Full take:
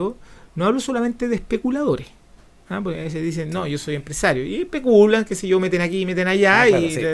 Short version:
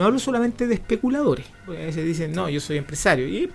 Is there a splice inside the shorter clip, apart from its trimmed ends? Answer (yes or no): yes